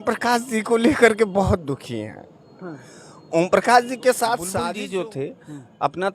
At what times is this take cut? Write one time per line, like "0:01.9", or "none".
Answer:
0:04.6